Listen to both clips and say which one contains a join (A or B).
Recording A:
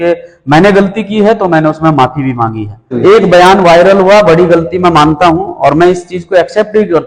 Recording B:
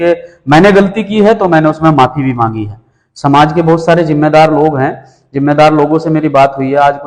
A